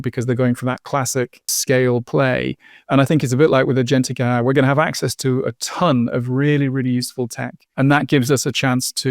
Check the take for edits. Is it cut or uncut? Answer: cut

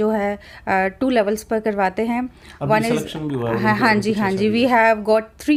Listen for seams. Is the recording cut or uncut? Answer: uncut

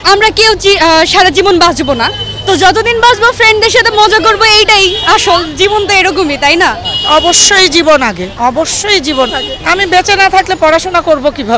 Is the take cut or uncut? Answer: cut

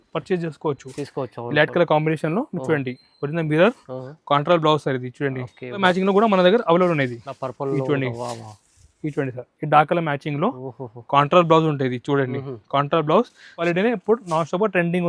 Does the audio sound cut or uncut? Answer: cut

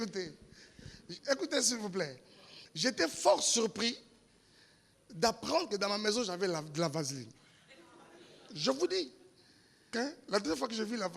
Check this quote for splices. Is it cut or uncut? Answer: cut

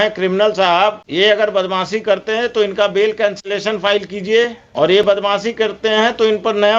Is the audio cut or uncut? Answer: cut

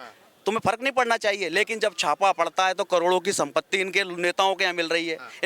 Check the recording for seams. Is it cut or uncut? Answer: uncut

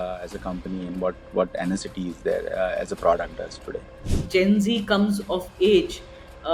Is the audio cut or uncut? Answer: cut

